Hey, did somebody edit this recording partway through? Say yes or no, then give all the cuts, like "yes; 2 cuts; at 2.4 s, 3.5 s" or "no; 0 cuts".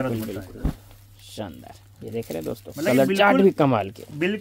no; 0 cuts